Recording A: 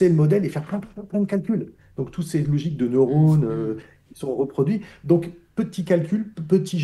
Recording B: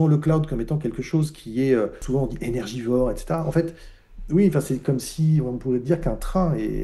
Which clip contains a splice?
B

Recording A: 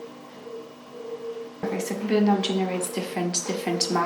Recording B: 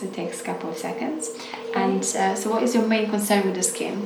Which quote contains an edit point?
A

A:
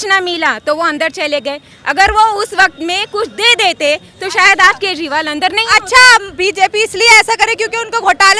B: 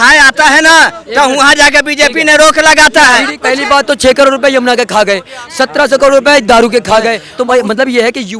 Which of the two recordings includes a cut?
B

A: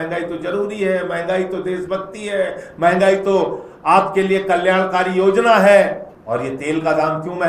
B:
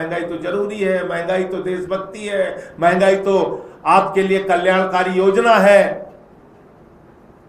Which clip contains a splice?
A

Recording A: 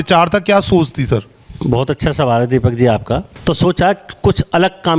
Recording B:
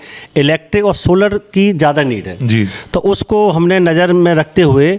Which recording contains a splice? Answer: A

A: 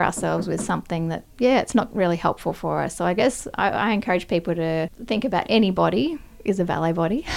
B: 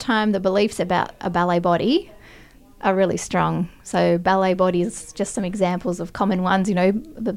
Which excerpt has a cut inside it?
A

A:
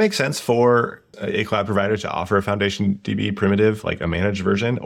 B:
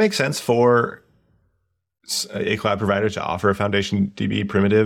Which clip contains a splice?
A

